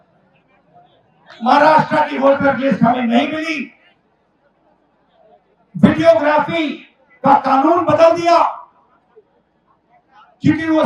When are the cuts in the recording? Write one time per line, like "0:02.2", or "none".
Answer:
none